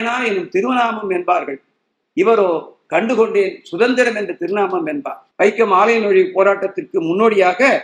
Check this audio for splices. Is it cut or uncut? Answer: cut